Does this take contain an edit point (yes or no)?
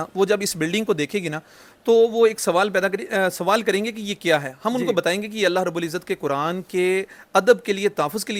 no